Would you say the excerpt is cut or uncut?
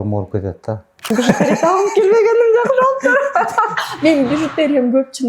cut